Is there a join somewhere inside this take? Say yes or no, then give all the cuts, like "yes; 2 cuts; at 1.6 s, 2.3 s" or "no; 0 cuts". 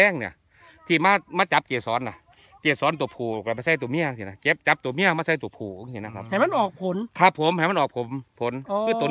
no; 0 cuts